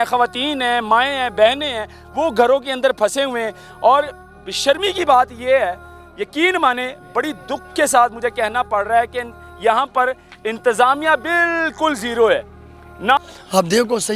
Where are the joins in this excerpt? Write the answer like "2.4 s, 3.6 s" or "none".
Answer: 13.2 s

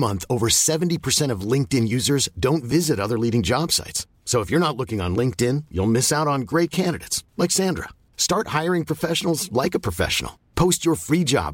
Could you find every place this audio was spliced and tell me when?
none

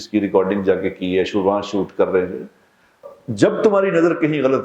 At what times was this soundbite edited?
3.0 s

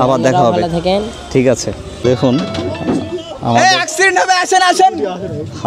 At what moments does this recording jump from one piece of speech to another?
1.9 s

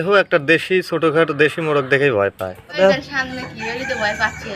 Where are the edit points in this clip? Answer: 2.8 s

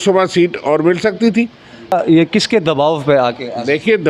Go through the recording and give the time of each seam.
1.9 s

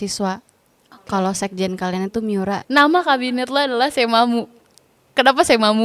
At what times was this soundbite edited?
2.6 s

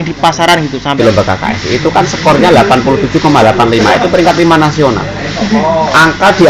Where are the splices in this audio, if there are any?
1.0 s

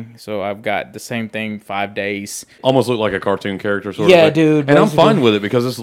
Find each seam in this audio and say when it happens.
2.6 s

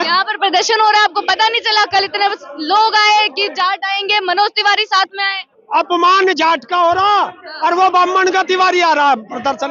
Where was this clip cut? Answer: 5.6 s

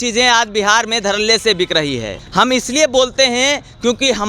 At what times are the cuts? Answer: 2.1 s

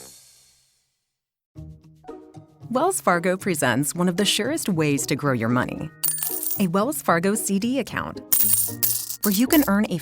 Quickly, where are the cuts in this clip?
1.5 s

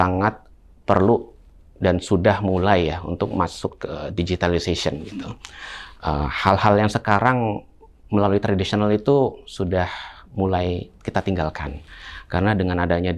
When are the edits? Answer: none

